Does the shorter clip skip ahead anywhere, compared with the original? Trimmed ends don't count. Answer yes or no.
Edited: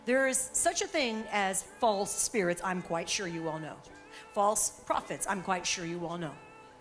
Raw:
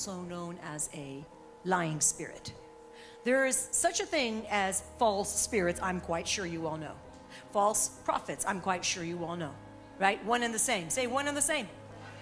no